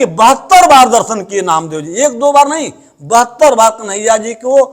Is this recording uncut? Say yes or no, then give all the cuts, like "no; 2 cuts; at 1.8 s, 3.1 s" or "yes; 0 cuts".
yes; 0 cuts